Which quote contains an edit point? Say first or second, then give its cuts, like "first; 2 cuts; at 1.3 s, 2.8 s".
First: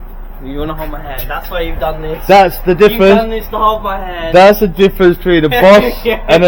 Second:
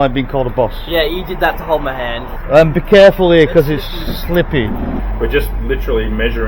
second; 2 cuts; at 2.3 s, 5.0 s